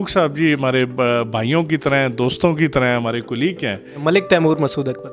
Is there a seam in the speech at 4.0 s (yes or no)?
yes